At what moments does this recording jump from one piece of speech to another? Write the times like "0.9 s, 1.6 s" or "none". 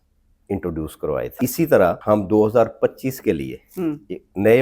1.3 s, 2.0 s